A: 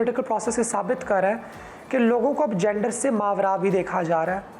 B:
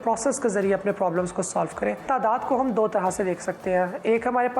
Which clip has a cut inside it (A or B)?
B